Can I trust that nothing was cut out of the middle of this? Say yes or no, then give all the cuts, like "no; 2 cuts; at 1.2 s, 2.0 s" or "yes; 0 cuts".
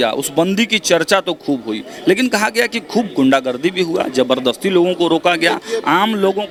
yes; 0 cuts